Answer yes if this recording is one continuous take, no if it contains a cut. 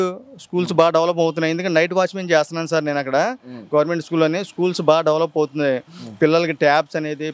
yes